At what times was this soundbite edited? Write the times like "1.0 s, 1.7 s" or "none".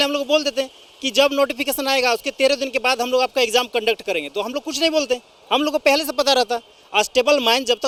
none